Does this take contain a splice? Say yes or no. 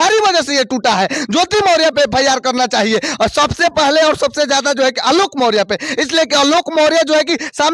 no